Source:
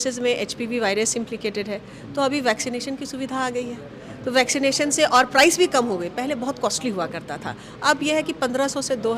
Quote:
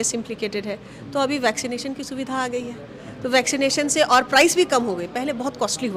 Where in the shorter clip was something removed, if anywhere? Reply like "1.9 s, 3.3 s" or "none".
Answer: none